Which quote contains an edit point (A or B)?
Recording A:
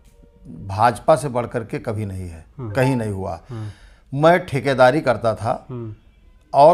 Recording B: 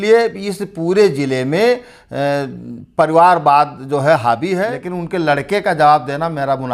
B